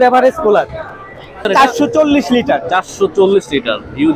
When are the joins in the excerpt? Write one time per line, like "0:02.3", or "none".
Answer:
0:01.5

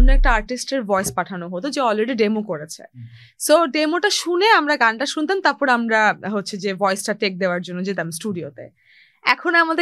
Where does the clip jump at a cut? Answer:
none

